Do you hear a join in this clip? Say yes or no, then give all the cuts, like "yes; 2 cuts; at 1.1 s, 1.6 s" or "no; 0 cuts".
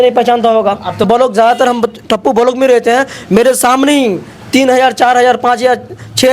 yes; 1 cut; at 1.1 s